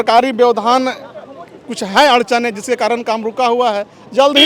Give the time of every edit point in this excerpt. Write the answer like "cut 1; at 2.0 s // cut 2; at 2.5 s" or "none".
none

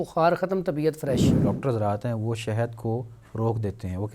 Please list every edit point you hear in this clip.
cut 1; at 1.4 s

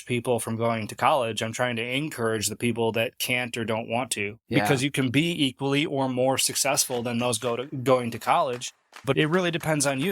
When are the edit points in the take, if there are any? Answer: cut 1; at 9.1 s

